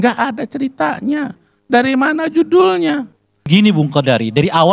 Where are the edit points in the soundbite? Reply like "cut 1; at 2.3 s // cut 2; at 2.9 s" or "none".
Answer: cut 1; at 3.5 s